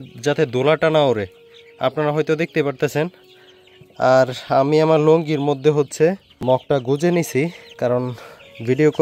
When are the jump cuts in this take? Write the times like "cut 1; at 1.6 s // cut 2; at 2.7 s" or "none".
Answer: cut 1; at 6.6 s // cut 2; at 7.6 s